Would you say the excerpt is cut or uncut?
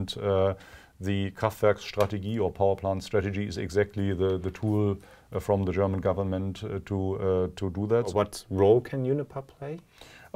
cut